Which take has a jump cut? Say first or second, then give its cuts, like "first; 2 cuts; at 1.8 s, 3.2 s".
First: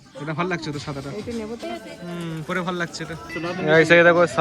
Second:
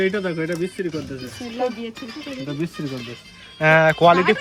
first; 2 cuts; at 1.6 s, 3.3 s